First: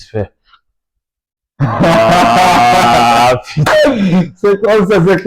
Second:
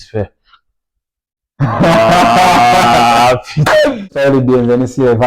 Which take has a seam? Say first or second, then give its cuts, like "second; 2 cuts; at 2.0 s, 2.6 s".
second; 1 cut; at 4.1 s